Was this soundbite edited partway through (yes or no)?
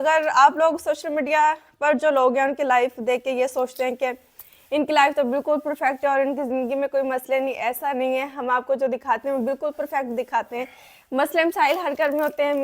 no